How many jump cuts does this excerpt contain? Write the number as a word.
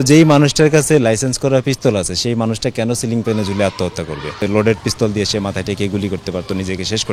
one